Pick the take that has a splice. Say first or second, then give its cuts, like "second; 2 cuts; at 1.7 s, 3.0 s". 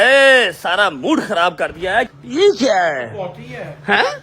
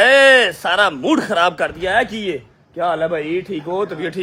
first; 1 cut; at 2.1 s